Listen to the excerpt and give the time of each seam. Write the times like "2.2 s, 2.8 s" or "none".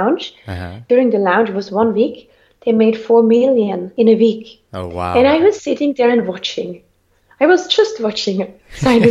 0.8 s, 3.8 s